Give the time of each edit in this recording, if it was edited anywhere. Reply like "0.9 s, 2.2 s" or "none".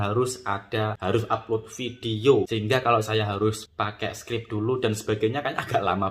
1.0 s, 2.5 s, 3.6 s